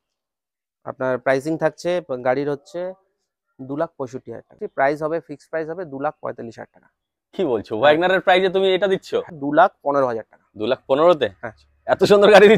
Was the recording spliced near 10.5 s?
no; 2 cuts; at 4.6 s, 9.3 s

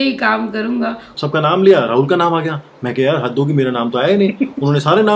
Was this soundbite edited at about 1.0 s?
yes; 1 cut; at 1.0 s

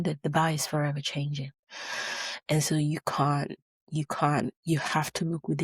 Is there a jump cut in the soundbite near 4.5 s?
yes; 1 cut; at 4.5 s

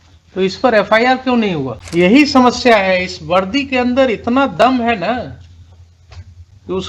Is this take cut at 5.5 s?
no; 1 cut; at 1.8 s

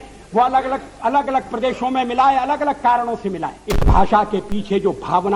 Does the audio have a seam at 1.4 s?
no; 1 cut; at 3.7 s

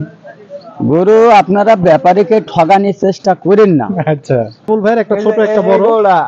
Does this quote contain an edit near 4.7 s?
yes; 1 cut; at 4.7 s

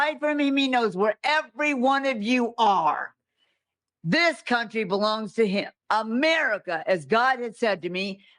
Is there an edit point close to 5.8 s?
yes; 1 cut; at 5.8 s

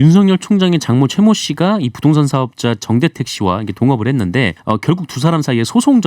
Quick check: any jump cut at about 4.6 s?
yes; 1 cut; at 4.6 s

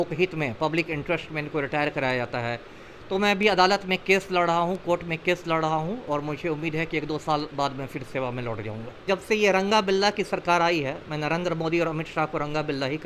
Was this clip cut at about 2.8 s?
no; 1 cut; at 9.0 s

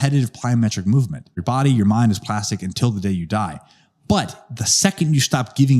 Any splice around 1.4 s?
yes; 1 cut; at 1.4 s

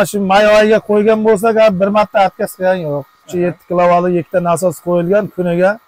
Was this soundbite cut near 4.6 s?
no; 1 cut; at 3.2 s

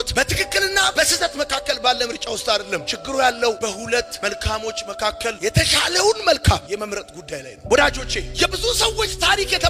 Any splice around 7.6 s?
yes; 1 cut; at 7.6 s

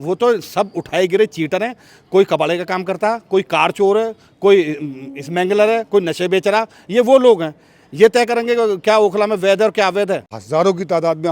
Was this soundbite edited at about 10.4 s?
yes; 1 cut; at 10.4 s

